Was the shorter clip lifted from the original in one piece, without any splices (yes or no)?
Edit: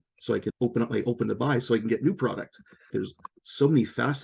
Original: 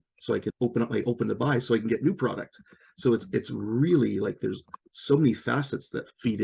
no